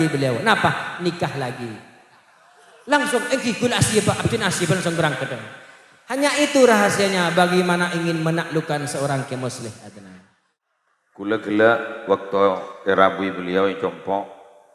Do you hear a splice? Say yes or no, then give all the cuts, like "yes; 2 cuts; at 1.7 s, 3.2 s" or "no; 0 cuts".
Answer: yes; 1 cut; at 10.6 s